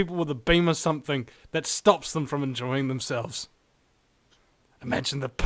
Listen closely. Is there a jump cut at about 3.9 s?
no; 0 cuts

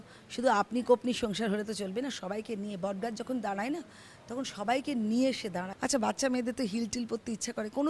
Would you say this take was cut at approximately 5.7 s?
yes; 1 cut; at 5.7 s

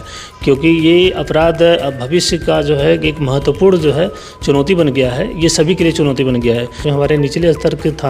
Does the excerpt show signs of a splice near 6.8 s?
yes; 1 cut; at 6.8 s

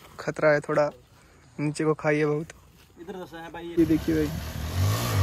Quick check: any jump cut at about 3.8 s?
yes; 1 cut; at 3.8 s

